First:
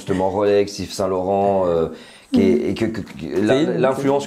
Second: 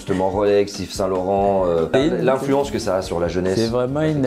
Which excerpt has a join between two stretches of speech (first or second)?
second